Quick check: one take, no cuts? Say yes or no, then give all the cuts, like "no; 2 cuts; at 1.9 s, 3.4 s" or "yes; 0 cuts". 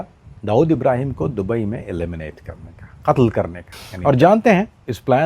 no; 1 cut; at 4.0 s